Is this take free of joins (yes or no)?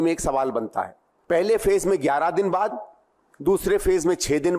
no